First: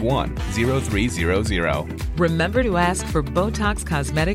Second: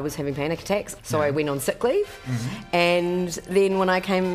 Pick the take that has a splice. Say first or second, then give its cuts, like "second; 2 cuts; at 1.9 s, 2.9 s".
second; 1 cut; at 0.9 s